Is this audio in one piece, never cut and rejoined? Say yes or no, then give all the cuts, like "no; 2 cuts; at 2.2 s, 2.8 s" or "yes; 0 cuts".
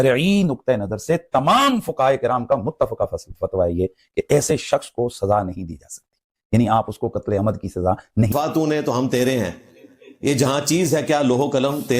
no; 1 cut; at 8.3 s